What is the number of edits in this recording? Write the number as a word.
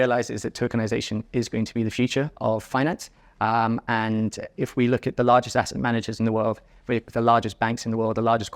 one